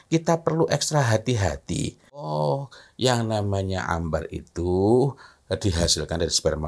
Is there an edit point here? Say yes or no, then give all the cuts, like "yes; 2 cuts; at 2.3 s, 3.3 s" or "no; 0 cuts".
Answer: yes; 1 cut; at 2.3 s